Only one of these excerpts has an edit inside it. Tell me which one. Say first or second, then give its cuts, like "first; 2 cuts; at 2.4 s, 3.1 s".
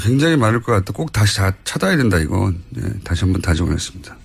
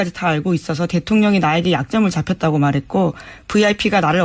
first; 1 cut; at 1.0 s